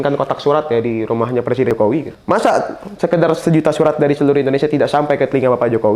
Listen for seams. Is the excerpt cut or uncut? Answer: cut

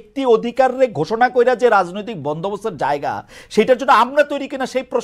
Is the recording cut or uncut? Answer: uncut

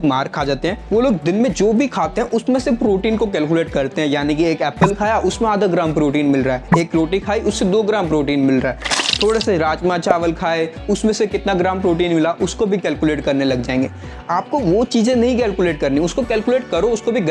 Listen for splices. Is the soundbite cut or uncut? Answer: uncut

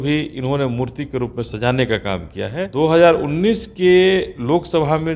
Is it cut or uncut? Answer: cut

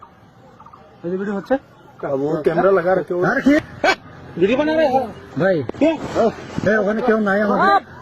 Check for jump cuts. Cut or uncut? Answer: cut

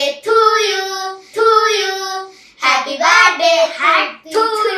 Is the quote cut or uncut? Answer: uncut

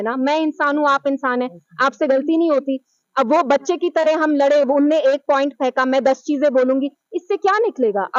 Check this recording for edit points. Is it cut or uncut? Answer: uncut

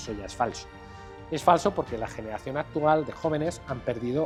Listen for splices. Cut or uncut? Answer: uncut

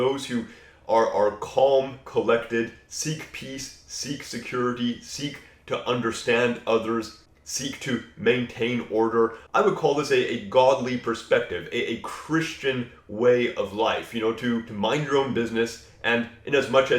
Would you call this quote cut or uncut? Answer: uncut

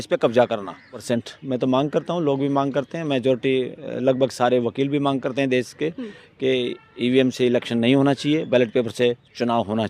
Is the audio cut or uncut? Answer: cut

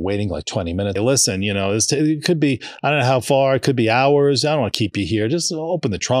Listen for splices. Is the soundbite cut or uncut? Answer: cut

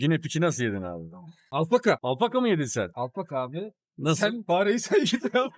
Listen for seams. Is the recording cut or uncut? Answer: uncut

